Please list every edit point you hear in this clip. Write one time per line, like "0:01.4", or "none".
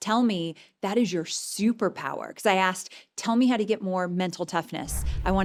none